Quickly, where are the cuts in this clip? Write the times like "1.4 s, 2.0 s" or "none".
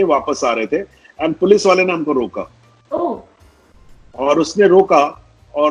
none